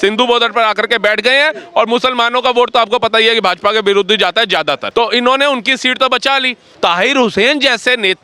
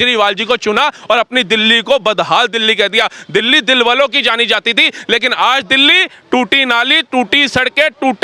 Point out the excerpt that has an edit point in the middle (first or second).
first